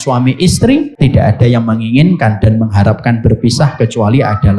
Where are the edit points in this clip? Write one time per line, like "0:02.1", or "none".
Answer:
0:00.9

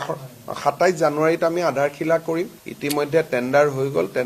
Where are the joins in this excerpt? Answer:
none

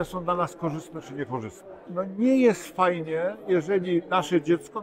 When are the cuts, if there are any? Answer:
0:01.9

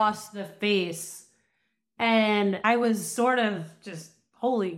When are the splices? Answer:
0:02.6

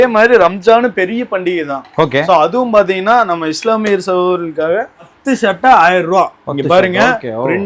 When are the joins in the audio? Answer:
0:05.1

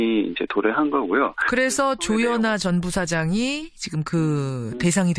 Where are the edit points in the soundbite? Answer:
0:02.5

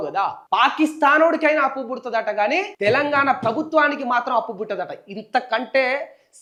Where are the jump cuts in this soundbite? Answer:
none

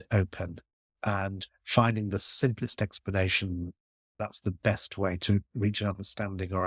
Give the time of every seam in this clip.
0:04.1
0:05.5

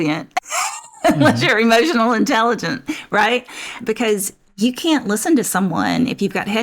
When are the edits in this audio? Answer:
0:03.8

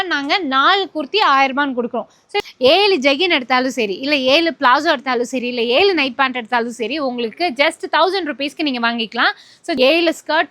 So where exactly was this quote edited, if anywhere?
0:02.3
0:09.8

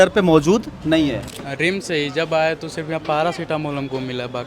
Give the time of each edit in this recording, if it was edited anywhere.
0:01.3

